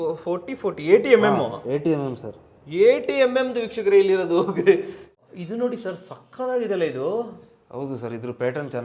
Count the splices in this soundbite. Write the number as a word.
one